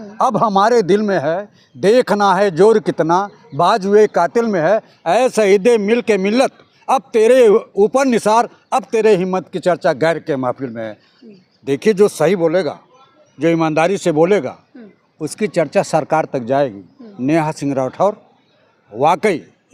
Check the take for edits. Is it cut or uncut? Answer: uncut